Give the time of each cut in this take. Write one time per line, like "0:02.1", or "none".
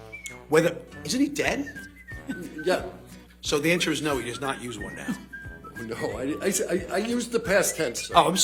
none

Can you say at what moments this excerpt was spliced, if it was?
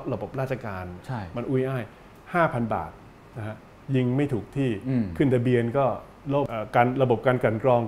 0:06.5

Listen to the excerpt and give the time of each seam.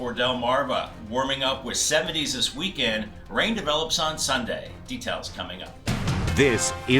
0:05.7

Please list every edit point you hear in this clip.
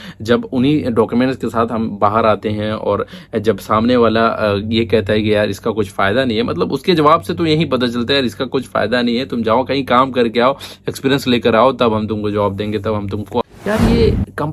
0:13.4

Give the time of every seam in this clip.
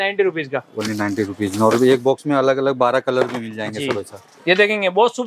none

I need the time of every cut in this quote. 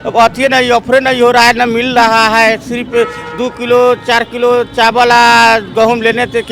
none

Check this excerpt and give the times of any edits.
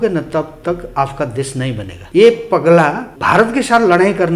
0:01.9
0:03.1

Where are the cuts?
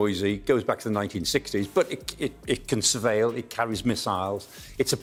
none

